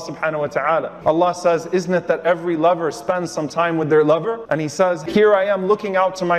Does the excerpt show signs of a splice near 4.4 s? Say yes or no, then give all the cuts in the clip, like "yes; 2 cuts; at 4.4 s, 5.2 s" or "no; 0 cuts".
yes; 1 cut; at 4.4 s